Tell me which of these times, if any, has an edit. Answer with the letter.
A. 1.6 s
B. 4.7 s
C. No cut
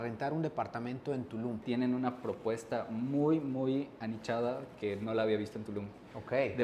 A